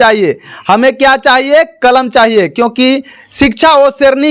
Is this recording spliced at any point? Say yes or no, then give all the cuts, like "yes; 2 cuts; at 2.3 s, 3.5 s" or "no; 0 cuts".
no; 0 cuts